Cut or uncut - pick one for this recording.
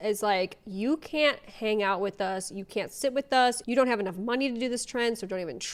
uncut